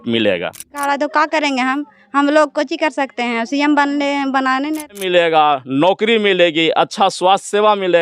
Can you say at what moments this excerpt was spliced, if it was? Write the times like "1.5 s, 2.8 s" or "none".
0.8 s, 5.0 s